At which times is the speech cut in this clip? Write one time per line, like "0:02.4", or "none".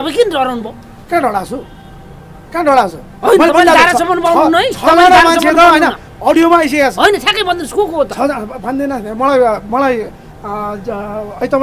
none